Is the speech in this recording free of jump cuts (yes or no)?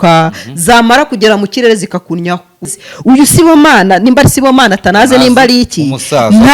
no